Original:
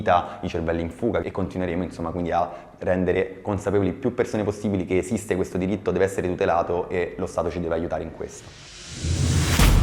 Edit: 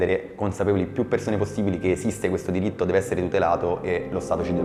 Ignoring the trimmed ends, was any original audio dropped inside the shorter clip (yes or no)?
no